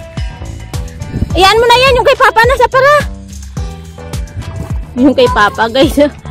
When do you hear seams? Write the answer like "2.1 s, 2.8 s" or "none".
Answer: 1.1 s

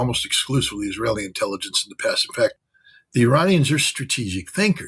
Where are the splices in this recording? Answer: 2.7 s

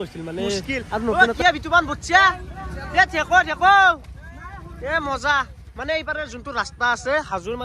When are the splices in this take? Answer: 1.2 s

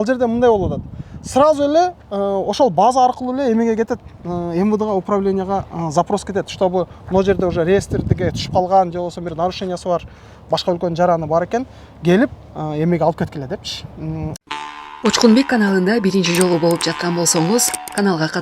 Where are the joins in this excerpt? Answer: 14.3 s

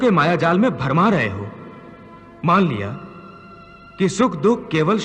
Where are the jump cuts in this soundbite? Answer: none

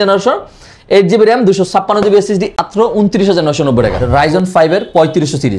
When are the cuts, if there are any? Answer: 2.6 s, 4.0 s

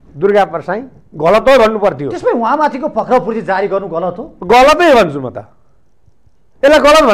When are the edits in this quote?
none

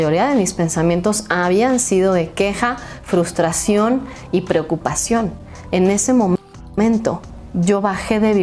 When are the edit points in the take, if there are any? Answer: none

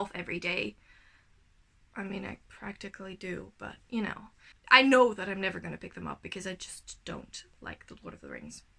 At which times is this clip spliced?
none

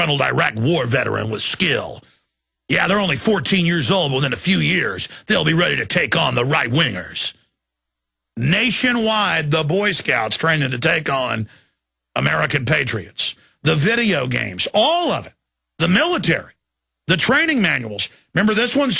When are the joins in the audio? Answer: 10.2 s

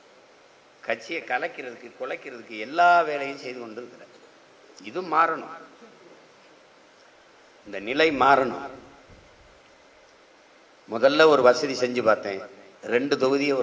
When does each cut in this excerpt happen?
none

